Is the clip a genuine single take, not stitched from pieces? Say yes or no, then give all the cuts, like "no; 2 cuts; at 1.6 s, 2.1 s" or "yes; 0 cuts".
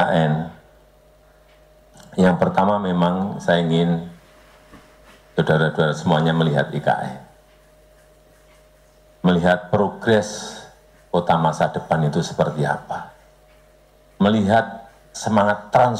yes; 0 cuts